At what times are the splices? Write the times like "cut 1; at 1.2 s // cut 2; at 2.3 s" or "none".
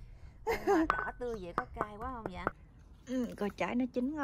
cut 1; at 2.6 s